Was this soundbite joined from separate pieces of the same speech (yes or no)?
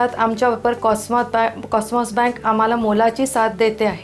no